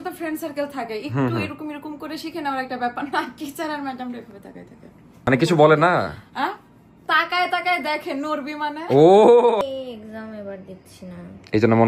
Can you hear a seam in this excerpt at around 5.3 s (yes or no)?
yes